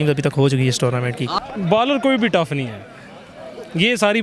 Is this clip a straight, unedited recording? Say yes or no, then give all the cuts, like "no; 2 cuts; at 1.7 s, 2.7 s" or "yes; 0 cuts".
no; 1 cut; at 1.4 s